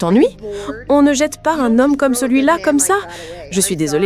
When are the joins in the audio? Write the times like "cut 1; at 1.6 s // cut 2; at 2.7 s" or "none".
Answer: none